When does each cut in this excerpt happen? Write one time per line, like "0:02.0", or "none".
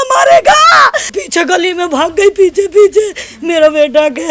0:01.2